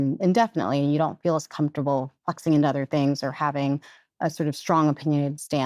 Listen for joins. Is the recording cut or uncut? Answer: uncut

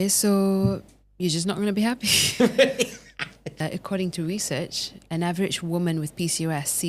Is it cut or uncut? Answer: cut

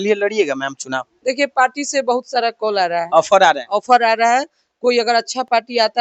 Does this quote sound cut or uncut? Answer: uncut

